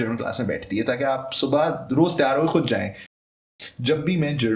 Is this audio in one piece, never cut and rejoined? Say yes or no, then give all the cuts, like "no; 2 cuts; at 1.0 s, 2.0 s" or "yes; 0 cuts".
no; 1 cut; at 3.2 s